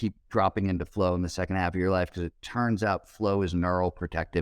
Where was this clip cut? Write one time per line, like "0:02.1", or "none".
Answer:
none